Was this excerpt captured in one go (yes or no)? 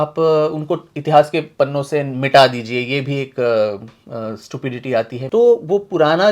no